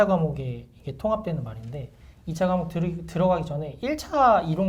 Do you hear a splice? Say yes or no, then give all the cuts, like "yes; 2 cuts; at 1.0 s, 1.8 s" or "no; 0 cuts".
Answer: no; 0 cuts